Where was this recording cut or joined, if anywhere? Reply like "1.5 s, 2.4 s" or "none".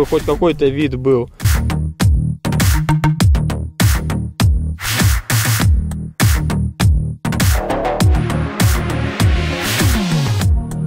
none